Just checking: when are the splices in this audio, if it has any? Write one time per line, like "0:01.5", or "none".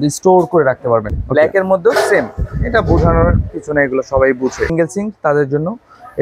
0:01.1
0:04.7